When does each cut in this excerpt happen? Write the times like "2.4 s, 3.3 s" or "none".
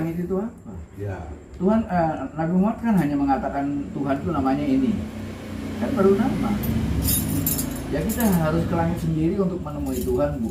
none

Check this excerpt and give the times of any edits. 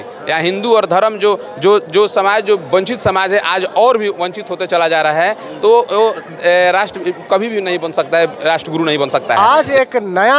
9.4 s

